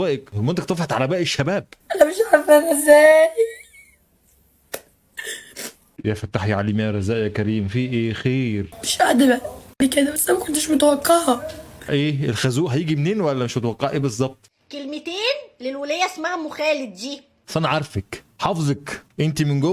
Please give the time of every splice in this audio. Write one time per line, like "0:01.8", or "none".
0:01.7
0:08.7
0:14.4